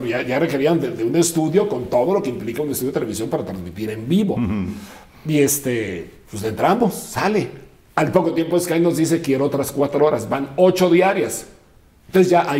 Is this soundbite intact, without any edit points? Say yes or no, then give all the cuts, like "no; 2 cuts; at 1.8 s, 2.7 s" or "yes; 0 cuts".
yes; 0 cuts